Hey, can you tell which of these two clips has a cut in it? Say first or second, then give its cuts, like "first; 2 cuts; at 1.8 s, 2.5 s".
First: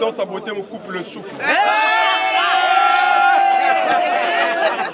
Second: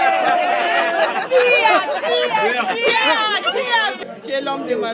second; 1 cut; at 4.0 s